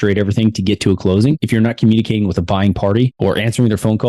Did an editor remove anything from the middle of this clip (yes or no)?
yes